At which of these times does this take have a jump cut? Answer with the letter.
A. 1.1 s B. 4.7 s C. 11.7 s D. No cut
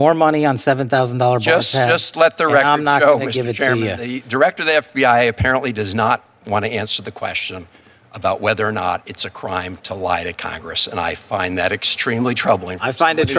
B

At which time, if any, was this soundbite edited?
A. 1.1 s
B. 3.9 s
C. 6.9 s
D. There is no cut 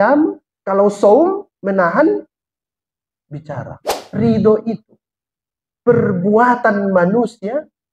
B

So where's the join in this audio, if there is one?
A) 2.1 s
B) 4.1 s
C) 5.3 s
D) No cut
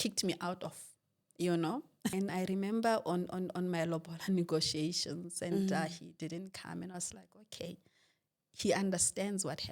A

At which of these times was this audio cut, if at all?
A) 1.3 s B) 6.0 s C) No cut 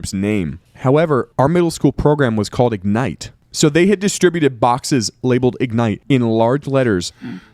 A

